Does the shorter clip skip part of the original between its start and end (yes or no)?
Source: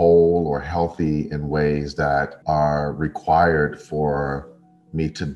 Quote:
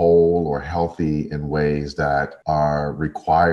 no